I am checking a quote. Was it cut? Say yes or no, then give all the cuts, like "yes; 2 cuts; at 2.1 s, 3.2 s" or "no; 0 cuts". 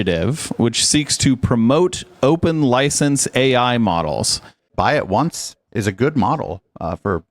yes; 1 cut; at 4.6 s